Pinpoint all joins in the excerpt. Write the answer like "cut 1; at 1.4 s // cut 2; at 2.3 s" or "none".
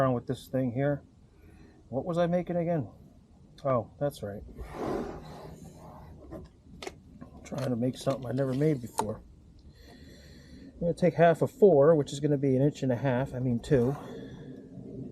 none